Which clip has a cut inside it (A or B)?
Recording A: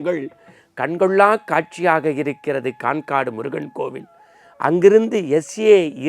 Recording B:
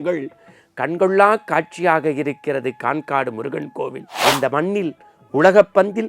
B